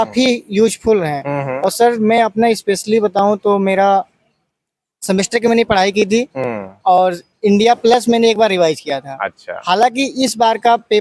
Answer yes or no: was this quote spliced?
no